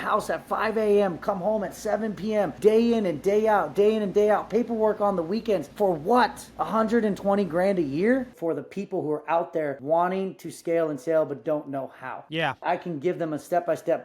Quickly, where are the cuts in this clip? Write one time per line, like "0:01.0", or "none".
0:02.5
0:05.7
0:06.5
0:08.3
0:09.8
0:12.6